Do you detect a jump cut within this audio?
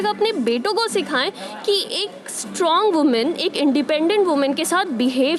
no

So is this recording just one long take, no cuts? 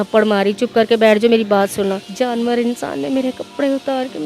no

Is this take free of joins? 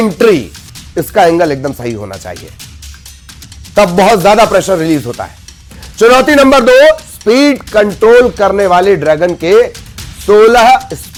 yes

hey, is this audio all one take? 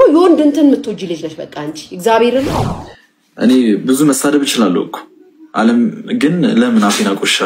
no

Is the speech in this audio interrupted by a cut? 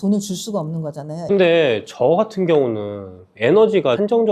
yes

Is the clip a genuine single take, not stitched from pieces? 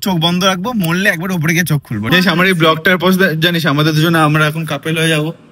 no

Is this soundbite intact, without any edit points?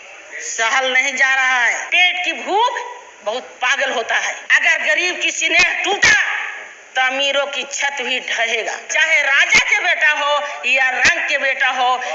no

